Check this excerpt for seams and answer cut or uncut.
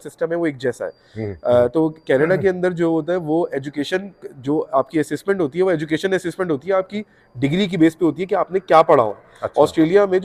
uncut